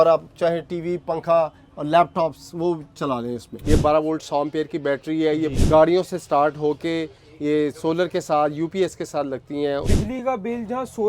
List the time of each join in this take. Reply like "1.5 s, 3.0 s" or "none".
3.5 s, 5.5 s, 9.9 s